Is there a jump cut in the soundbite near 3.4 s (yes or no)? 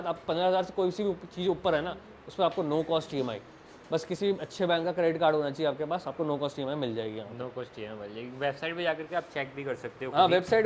no